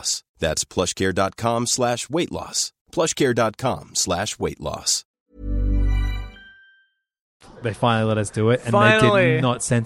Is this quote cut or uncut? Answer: uncut